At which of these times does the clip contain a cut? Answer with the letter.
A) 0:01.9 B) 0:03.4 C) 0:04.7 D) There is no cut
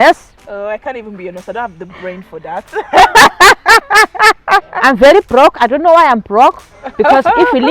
C